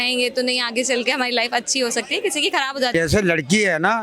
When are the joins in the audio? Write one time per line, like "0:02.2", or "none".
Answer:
0:02.9